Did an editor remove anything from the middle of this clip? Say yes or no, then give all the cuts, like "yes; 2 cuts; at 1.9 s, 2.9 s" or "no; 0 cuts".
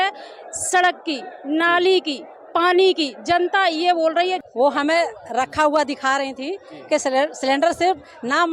yes; 1 cut; at 4.4 s